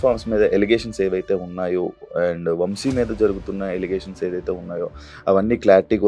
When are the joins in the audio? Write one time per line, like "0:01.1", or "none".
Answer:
none